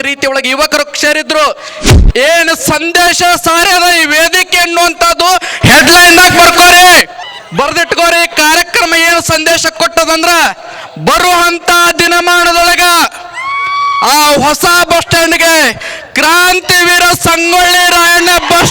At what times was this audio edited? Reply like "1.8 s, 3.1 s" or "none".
7.2 s